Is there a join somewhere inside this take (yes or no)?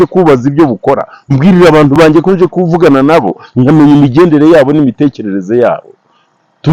no